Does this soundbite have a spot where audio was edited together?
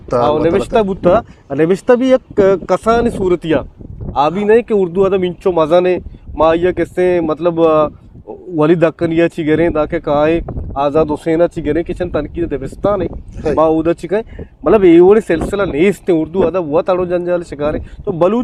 no; 0 cuts

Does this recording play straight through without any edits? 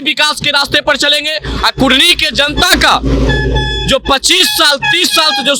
yes; 0 cuts

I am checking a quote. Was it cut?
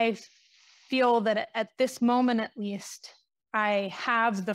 no; 0 cuts

